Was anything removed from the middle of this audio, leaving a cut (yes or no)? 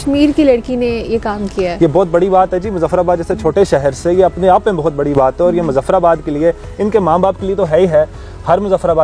no